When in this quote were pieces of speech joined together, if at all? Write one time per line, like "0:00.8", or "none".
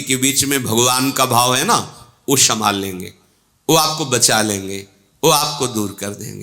none